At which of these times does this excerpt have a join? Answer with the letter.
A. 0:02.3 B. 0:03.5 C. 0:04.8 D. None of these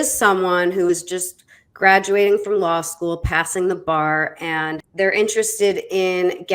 C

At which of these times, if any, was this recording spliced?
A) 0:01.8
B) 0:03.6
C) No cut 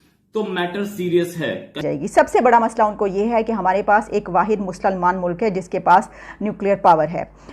A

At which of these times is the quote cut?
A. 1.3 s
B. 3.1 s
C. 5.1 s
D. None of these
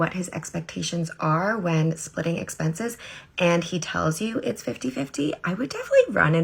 D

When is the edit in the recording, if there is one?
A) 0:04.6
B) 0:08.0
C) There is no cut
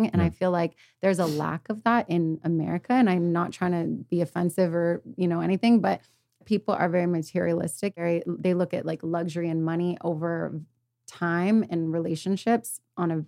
B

